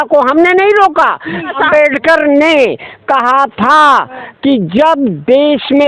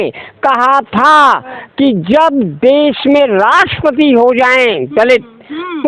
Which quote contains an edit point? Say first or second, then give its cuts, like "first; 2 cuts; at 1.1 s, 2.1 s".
first; 1 cut; at 1.6 s